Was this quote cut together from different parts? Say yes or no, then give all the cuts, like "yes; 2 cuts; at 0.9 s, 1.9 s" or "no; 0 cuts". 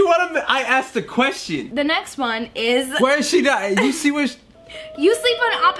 yes; 1 cut; at 1.7 s